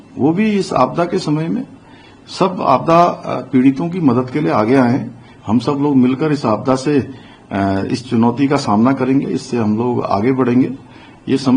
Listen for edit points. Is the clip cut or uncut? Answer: uncut